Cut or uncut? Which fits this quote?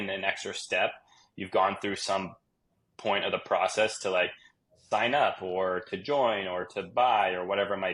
uncut